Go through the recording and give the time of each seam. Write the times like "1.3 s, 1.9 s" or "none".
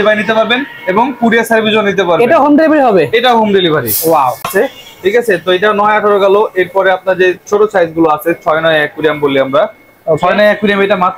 4.5 s